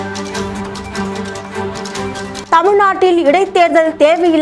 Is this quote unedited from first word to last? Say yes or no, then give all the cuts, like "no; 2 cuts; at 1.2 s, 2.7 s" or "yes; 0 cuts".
no; 1 cut; at 2.4 s